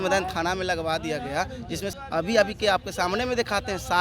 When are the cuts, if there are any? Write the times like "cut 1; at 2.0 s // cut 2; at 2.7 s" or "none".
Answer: cut 1; at 1.9 s